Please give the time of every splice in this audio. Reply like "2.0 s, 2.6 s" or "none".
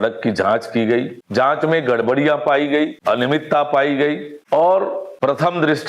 1.2 s, 3.0 s, 4.3 s, 5.1 s